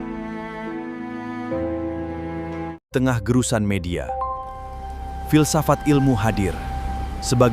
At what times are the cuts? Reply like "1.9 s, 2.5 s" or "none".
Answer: 2.8 s